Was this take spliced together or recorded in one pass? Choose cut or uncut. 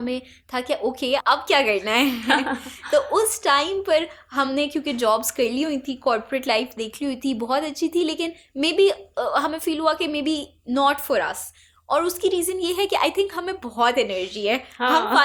uncut